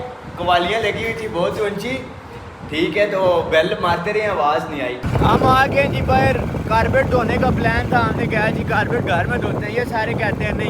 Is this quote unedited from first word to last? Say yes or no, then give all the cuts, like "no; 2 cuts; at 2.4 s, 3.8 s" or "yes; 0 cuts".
no; 1 cut; at 5.0 s